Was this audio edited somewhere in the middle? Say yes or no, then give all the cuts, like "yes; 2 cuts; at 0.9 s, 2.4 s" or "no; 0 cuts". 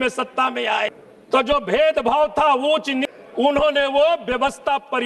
yes; 2 cuts; at 1.1 s, 3.0 s